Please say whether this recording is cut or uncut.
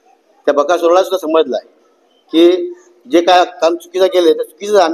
uncut